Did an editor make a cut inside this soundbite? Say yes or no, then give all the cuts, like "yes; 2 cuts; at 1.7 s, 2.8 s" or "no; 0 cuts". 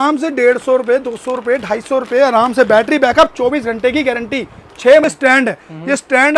yes; 1 cut; at 5.0 s